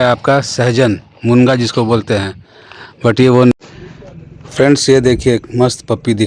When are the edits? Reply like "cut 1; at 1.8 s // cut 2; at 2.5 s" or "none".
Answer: cut 1; at 3.5 s